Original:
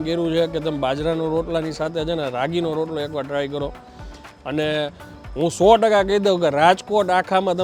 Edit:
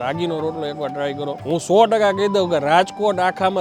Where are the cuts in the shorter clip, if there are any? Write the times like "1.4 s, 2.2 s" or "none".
1.4 s